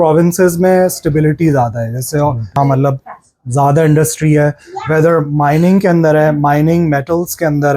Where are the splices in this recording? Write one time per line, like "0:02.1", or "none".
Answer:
0:02.6

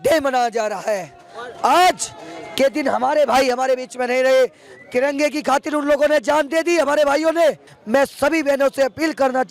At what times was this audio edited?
0:07.7

